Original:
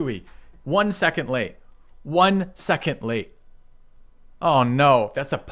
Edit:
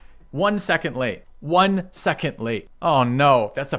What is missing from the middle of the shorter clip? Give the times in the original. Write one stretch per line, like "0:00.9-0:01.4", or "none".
0:01.6-0:01.9
0:03.3-0:04.3